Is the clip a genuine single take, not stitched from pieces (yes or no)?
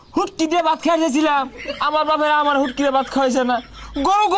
yes